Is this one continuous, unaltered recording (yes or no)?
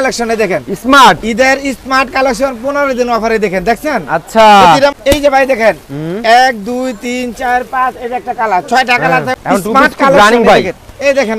no